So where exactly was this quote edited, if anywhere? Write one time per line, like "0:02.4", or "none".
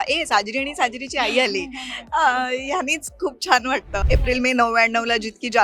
0:03.9